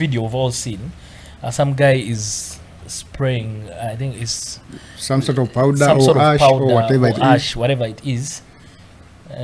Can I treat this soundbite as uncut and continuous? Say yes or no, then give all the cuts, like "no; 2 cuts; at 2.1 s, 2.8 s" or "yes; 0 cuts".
yes; 0 cuts